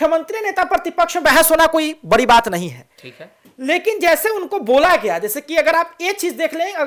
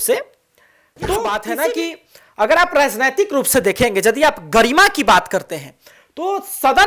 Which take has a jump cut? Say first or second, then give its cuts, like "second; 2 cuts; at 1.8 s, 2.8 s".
second; 1 cut; at 1.5 s